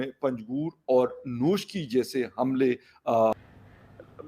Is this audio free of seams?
no; 1 cut; at 3.3 s

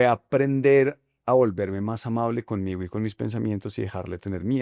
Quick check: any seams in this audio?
no; 0 cuts

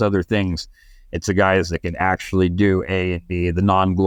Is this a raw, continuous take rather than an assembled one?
yes; 0 cuts

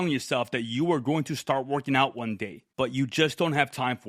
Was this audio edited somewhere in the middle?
yes; 1 cut; at 2.6 s

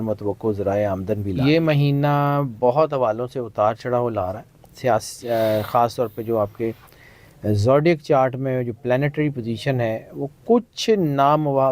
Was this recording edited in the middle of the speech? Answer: yes; 1 cut; at 1.4 s

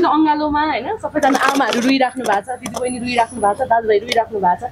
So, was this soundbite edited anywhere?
no; 0 cuts

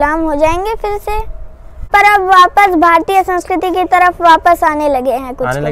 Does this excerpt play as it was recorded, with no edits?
yes; 0 cuts

